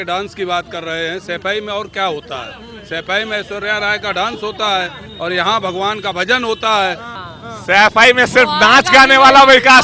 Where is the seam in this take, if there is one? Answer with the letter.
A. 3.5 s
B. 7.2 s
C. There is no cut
B